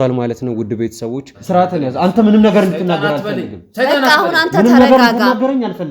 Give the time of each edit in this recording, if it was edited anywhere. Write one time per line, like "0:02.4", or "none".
0:01.3